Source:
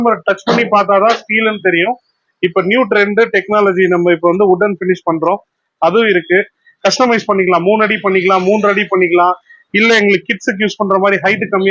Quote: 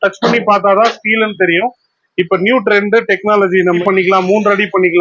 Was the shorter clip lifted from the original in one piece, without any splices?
no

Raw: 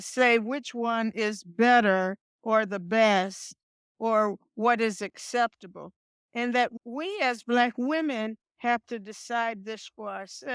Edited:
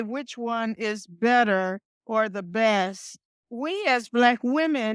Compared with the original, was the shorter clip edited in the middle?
yes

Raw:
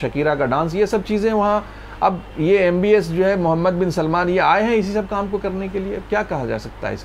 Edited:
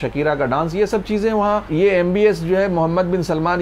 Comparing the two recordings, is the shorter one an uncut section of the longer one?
no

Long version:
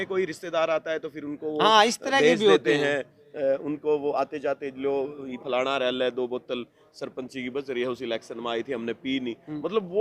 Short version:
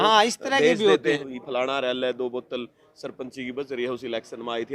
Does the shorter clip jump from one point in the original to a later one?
yes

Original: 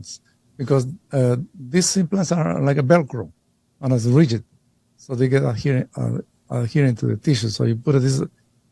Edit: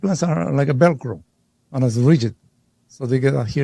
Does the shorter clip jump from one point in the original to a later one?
no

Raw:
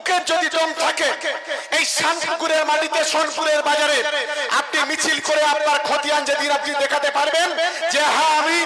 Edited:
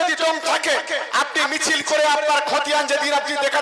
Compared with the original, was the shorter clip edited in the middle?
yes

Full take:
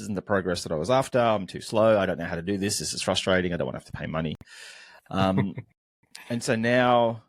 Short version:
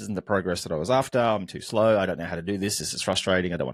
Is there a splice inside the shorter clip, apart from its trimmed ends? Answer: no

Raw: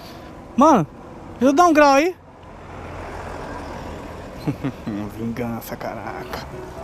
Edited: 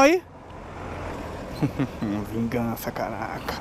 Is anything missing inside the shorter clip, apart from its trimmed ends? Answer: yes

